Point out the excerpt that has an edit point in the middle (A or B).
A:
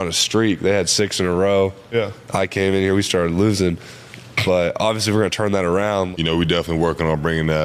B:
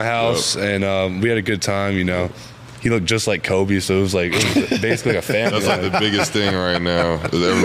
A